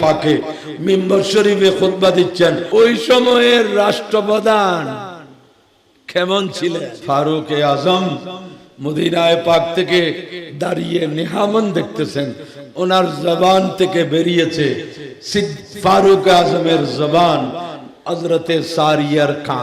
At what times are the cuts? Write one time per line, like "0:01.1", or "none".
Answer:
0:02.6
0:07.0